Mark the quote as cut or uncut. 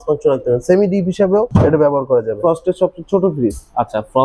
cut